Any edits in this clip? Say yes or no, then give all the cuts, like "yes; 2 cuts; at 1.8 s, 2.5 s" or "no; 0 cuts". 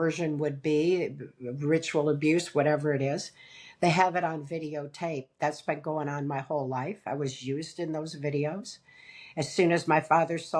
no; 0 cuts